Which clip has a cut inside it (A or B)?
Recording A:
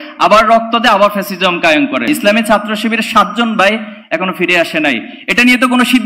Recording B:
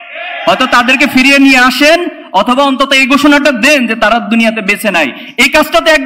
A